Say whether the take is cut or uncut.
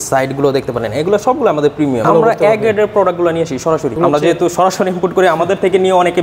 cut